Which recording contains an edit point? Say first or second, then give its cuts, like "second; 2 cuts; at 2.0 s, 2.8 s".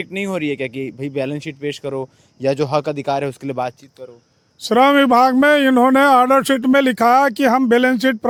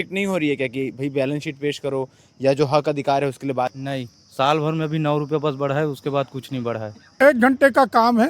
second; 2 cuts; at 3.8 s, 7.2 s